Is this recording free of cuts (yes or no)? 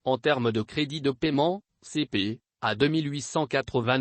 yes